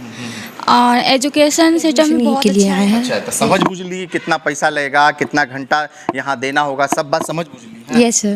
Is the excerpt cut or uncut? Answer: cut